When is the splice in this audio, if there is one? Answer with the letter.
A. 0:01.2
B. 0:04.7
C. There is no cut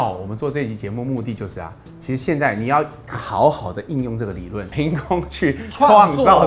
B